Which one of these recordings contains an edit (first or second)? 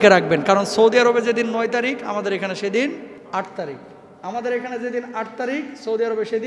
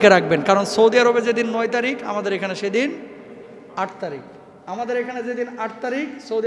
first